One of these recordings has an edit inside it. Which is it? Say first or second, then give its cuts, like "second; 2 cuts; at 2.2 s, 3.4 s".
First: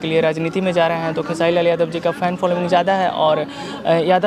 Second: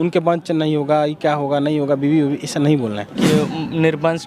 second; 1 cut; at 3.2 s